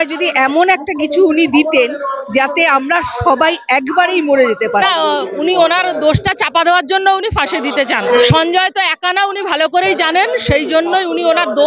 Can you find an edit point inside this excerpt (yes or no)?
yes